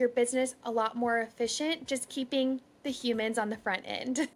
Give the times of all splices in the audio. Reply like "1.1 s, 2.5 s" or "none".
none